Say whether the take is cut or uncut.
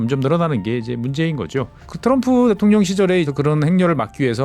cut